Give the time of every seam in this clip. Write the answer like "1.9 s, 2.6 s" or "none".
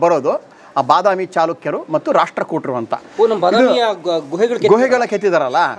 none